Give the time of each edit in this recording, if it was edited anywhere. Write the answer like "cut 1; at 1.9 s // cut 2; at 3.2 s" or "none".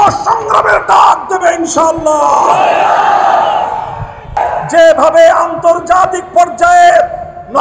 cut 1; at 4.4 s